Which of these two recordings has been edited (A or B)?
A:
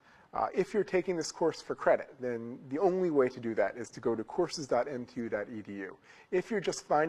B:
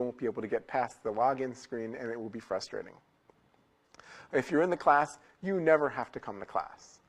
B